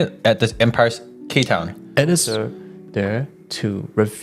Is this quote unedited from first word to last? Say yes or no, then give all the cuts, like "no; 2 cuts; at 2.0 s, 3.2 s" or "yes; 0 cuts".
no; 1 cut; at 2.3 s